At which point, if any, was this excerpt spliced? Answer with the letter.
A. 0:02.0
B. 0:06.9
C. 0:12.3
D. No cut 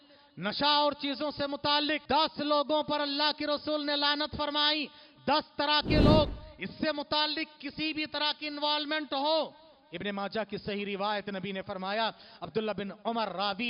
A